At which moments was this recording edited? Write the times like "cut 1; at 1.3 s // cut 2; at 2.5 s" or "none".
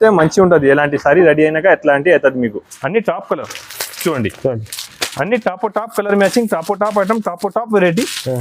cut 1; at 2.7 s